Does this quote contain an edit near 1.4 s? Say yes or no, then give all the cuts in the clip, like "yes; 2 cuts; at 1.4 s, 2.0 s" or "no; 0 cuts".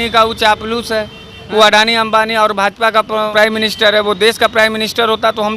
no; 1 cut; at 3.3 s